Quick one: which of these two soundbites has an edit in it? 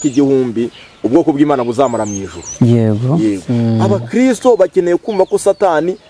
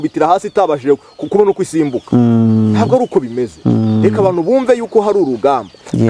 first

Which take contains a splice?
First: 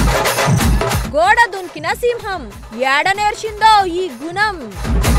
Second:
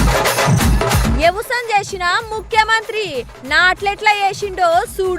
second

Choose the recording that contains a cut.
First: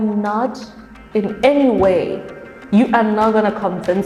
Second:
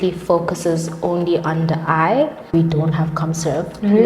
second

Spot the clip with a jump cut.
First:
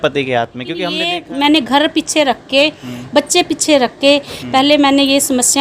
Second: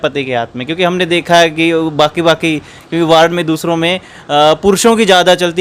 first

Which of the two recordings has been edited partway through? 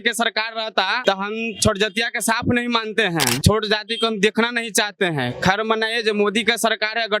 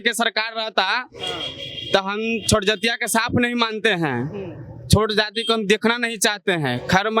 first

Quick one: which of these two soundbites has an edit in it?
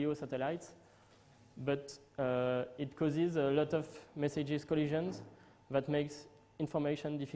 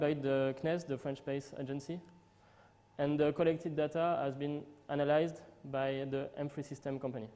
first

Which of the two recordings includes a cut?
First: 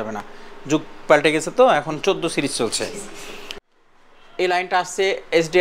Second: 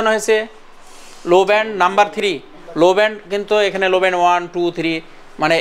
first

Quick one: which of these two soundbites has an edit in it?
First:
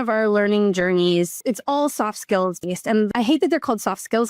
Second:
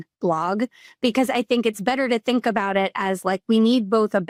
first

